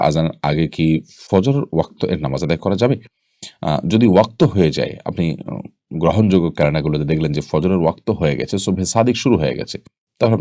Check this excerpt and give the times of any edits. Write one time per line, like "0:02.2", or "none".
none